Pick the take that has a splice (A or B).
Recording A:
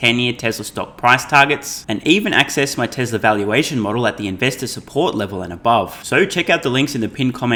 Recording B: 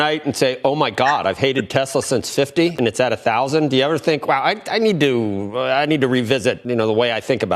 B